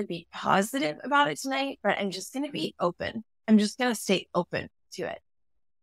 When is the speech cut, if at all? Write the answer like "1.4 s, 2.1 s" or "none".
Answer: none